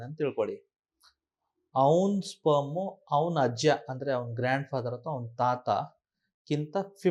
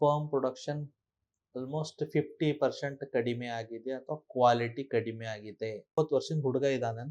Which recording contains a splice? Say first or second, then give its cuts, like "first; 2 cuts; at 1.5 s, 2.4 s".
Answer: second; 1 cut; at 6.0 s